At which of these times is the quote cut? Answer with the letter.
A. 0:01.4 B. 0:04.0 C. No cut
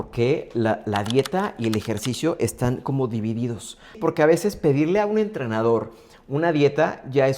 B